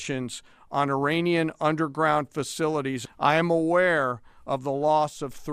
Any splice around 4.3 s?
no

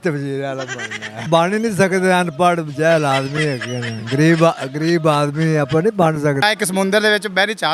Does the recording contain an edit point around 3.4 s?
no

